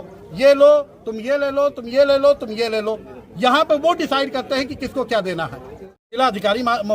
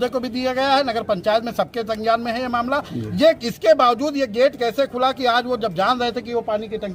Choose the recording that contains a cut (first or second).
first